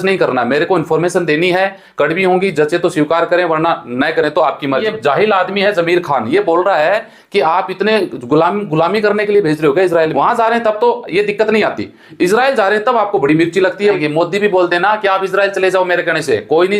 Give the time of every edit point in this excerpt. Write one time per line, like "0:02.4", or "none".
0:04.9
0:10.1
0:14.0